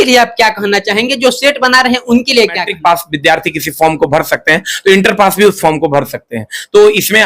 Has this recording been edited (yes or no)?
yes